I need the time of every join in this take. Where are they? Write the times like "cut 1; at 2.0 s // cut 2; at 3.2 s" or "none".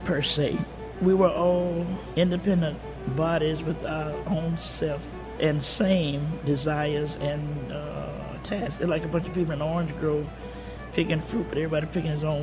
cut 1; at 2.0 s // cut 2; at 5.3 s